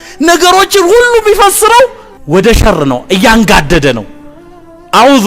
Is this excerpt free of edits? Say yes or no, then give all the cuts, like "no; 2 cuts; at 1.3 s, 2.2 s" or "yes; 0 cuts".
no; 1 cut; at 2.1 s